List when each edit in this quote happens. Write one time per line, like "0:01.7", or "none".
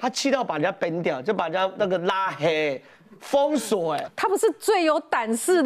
none